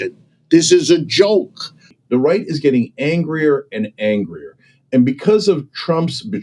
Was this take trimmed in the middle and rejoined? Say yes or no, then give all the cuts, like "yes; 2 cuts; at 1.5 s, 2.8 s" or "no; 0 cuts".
yes; 1 cut; at 1.9 s